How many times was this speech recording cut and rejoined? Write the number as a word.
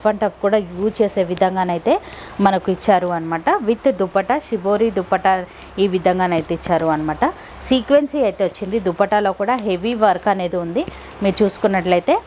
zero